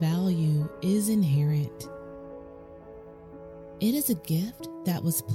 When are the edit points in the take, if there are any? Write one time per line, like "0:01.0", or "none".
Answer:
0:01.7
0:03.8